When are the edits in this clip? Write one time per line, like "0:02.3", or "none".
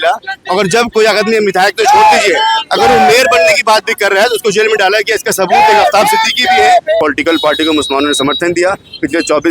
0:07.0